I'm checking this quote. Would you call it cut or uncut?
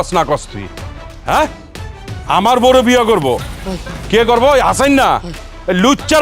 cut